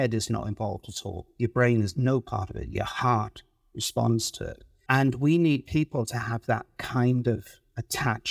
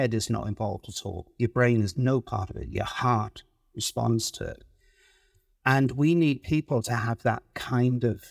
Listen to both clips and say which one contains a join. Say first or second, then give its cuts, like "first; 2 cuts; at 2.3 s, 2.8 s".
first; 1 cut; at 4.7 s